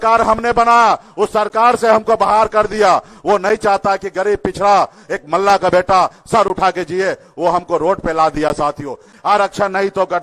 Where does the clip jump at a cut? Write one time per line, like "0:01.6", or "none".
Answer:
0:09.1